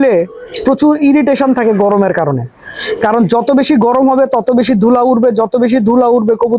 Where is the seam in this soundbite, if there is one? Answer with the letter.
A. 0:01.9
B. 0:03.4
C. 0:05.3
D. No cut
D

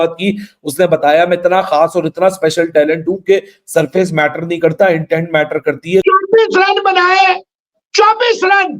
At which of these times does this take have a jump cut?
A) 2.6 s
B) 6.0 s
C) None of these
B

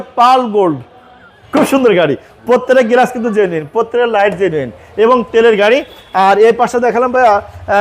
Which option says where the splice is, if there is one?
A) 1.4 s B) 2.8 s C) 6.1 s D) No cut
A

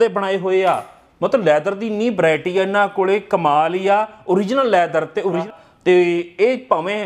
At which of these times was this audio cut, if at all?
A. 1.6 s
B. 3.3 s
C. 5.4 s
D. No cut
C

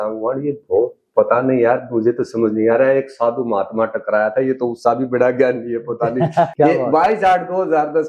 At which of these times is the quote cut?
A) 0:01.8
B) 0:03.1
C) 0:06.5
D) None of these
C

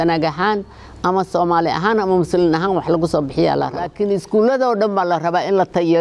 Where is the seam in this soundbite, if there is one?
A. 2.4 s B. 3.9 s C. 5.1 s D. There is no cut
B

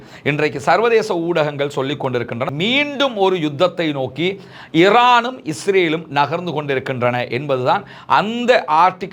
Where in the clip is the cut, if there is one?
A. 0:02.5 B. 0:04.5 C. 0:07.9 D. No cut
A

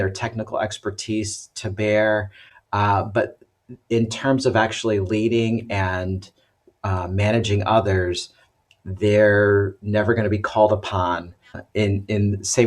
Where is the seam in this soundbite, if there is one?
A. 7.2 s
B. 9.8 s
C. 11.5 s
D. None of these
C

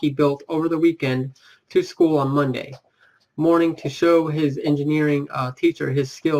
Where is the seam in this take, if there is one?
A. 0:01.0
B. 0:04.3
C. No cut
A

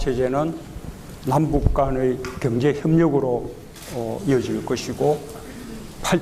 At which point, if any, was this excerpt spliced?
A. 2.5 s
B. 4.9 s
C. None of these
B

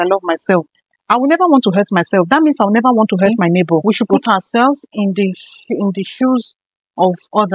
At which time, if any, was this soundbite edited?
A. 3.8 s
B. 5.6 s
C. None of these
A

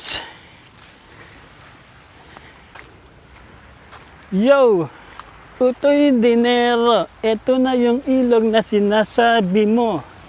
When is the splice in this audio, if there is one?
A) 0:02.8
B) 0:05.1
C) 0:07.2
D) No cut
A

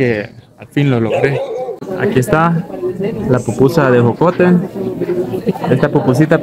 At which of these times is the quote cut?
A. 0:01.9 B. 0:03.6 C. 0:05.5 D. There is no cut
A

